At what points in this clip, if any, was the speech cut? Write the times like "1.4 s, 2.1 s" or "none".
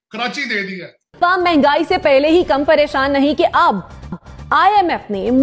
1.1 s